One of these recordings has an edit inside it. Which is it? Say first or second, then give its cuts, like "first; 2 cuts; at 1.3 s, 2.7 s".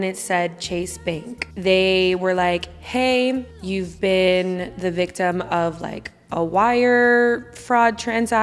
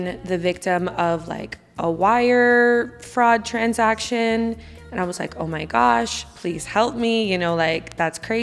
first; 2 cuts; at 1.4 s, 3.5 s